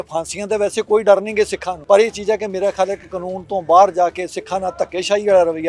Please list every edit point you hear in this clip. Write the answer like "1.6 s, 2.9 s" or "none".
1.7 s

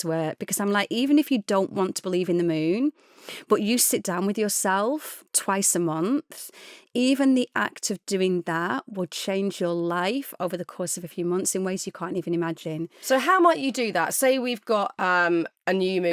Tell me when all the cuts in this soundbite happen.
none

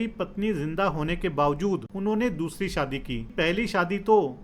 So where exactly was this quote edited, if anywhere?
1.9 s, 3.3 s

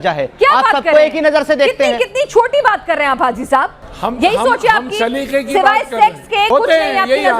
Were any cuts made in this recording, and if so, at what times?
3.8 s, 6.5 s

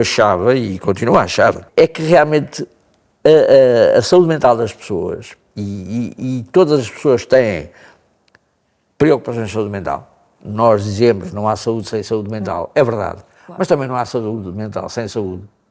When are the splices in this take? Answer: 1.6 s

